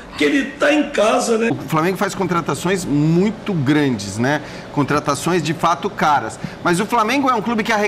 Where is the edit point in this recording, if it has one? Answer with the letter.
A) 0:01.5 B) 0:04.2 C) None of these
A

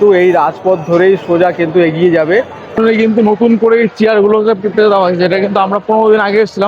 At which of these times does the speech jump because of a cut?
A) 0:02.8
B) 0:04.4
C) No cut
A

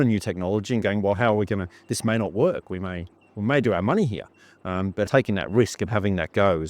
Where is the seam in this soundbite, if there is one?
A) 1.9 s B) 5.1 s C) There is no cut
B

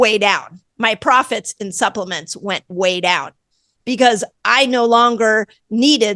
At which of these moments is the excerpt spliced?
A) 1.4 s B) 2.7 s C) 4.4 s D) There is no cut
D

